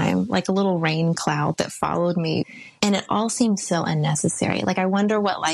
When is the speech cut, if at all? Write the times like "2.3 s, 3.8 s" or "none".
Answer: 2.5 s

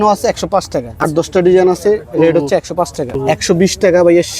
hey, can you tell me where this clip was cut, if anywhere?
1.3 s, 3.2 s

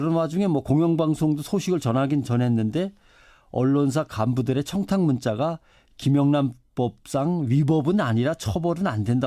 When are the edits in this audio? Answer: 7.4 s

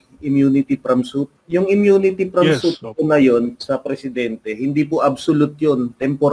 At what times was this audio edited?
1.4 s

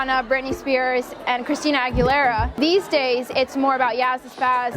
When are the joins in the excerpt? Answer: 2.6 s

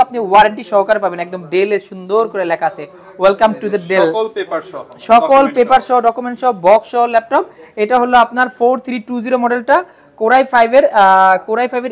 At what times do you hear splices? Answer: none

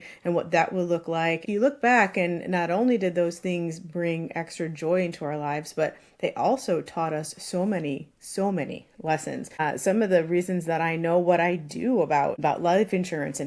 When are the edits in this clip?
1.4 s, 9.6 s, 12.4 s

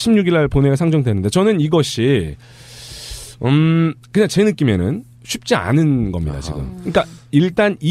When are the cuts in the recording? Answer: 6.0 s

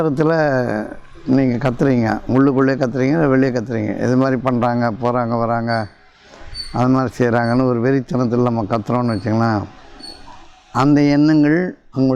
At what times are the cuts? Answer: none

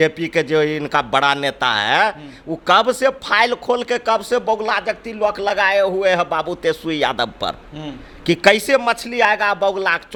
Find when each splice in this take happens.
none

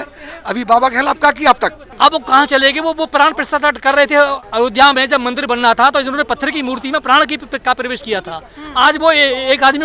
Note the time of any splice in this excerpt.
1.8 s, 4.4 s

